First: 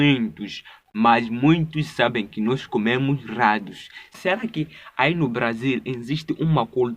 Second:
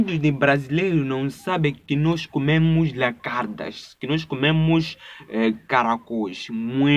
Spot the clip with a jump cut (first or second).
first